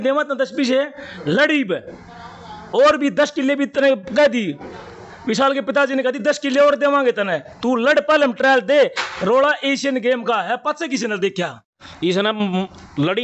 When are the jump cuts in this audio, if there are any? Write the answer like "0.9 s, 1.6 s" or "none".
12.2 s